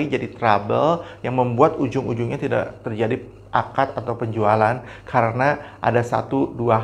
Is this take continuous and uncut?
yes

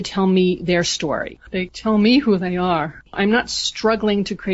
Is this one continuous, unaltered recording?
yes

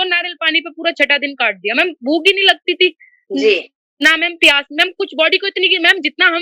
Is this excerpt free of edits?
yes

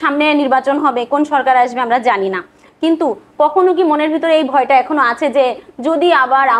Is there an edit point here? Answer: no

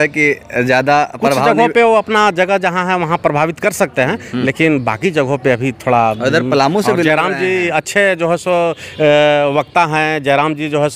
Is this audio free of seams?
yes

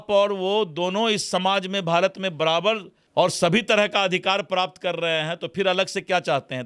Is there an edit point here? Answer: yes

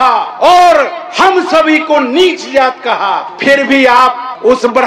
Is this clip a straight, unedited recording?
yes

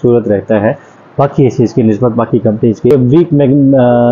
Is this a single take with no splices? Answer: no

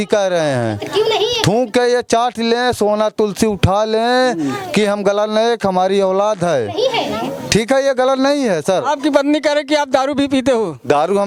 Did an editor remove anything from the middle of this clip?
no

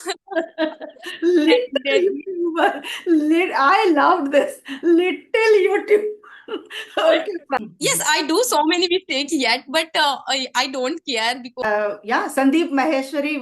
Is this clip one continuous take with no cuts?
no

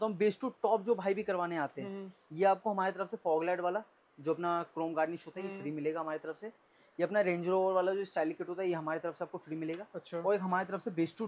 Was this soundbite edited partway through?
no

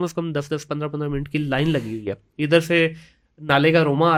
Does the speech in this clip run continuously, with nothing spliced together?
yes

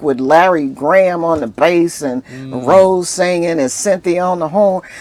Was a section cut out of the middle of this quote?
no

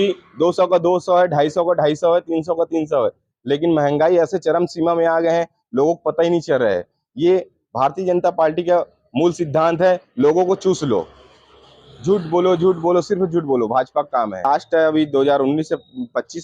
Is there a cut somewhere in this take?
yes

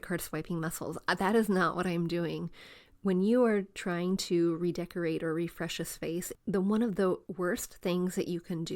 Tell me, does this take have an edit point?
yes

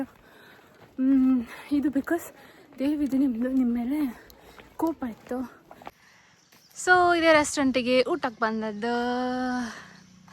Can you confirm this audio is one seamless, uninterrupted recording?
no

